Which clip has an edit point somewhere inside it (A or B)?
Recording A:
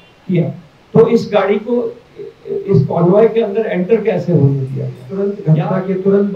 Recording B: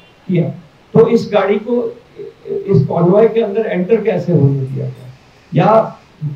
A